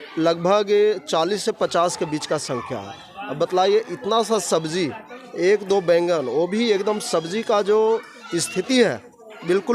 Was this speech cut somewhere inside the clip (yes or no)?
no